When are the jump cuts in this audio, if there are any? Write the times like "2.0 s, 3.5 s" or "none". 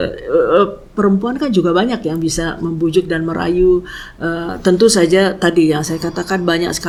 none